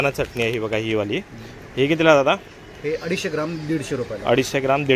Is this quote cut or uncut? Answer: uncut